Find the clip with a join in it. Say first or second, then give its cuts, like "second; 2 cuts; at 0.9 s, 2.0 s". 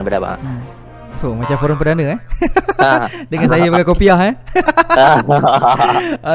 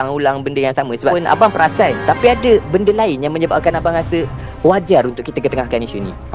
second; 1 cut; at 1.2 s